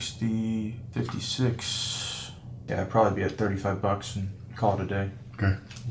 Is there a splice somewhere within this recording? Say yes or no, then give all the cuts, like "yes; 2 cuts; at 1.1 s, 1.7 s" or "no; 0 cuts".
no; 0 cuts